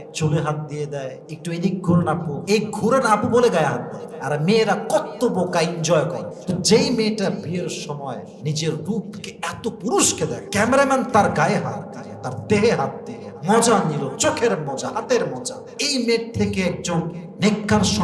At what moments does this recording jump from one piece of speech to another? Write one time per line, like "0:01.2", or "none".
0:01.3
0:02.3
0:06.3
0:10.4